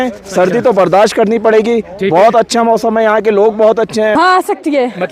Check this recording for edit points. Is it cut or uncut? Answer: cut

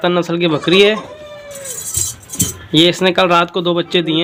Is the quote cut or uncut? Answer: uncut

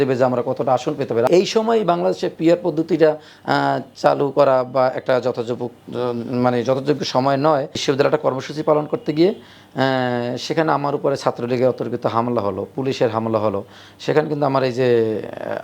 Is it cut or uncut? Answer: cut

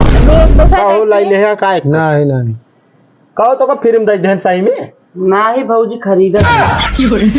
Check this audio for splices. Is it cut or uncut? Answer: cut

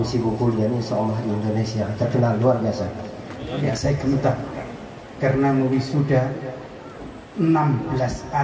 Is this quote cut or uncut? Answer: cut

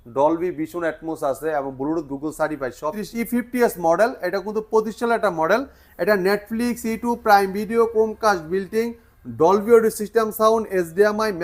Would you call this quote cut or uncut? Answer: cut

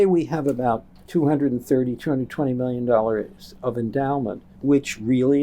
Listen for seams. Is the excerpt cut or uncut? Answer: cut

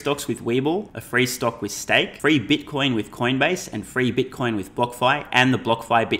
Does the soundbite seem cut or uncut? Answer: cut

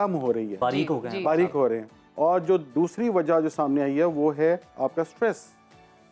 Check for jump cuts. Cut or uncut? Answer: uncut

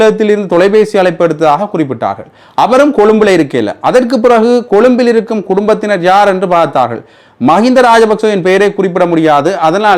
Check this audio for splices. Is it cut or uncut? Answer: uncut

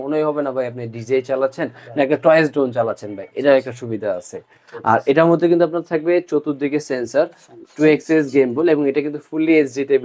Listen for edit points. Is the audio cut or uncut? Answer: uncut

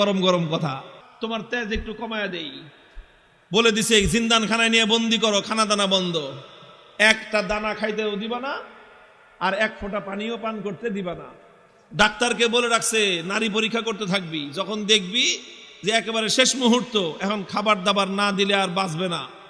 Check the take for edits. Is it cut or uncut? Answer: cut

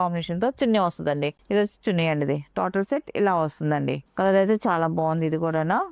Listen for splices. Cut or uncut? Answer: uncut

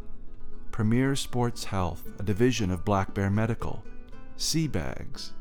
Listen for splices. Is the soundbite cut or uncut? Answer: cut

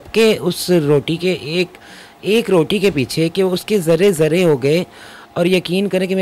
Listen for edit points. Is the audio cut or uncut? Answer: uncut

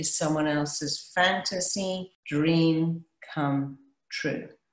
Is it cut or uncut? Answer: cut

